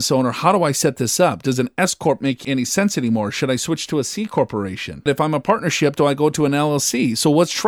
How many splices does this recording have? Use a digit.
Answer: 2